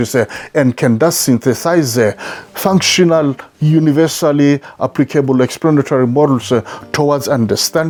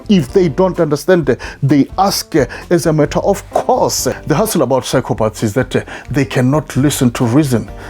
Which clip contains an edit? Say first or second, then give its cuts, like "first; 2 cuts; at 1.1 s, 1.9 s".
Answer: second; 1 cut; at 4.2 s